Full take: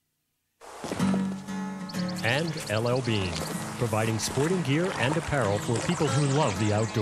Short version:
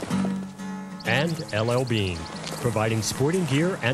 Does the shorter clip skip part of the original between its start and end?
yes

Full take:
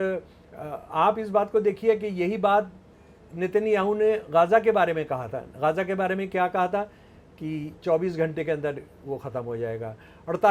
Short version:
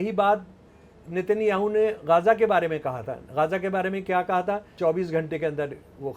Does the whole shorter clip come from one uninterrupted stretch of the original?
no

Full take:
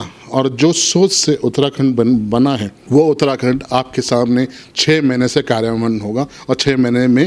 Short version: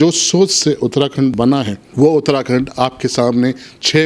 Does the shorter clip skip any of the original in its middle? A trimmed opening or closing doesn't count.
yes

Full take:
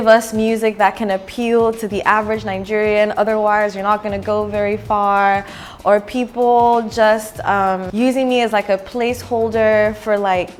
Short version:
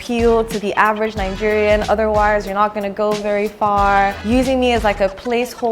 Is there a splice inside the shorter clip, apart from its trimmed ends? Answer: yes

